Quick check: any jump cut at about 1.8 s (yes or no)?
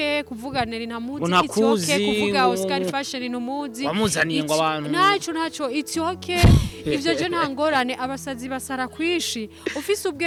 no